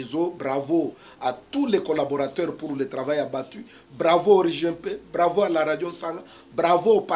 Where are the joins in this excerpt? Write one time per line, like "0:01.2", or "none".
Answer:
none